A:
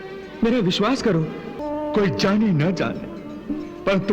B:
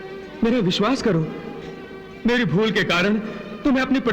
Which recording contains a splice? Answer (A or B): A